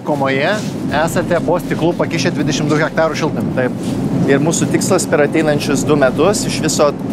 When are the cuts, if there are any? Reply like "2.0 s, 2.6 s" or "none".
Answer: 1.4 s, 4.1 s